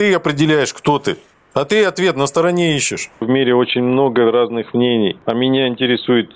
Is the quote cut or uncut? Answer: cut